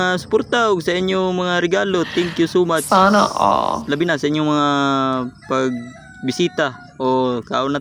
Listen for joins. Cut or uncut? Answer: uncut